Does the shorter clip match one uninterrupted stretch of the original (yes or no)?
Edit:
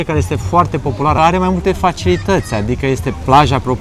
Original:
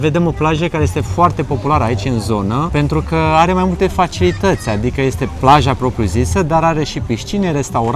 no